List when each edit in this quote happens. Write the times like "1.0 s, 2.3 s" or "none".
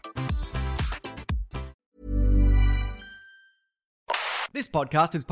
1.8 s, 4.2 s